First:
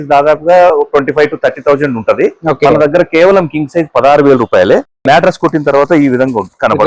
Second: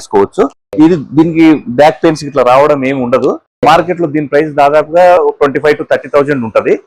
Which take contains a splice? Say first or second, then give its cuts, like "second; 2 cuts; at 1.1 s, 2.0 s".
second; 1 cut; at 3.5 s